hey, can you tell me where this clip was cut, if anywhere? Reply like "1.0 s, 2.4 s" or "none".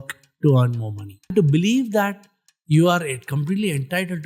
1.3 s